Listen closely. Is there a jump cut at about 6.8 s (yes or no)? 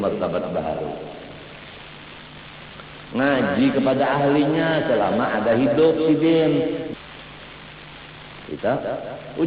yes